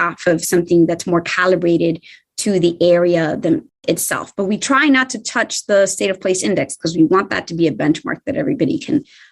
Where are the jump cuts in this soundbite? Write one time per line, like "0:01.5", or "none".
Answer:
none